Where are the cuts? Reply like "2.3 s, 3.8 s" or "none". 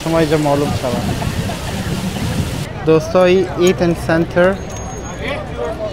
2.6 s